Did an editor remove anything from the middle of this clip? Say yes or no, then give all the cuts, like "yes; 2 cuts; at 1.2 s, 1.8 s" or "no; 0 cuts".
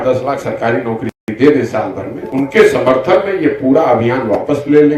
no; 0 cuts